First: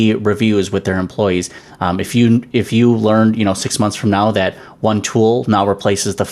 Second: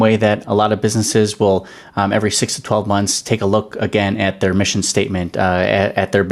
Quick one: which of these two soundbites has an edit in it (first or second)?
first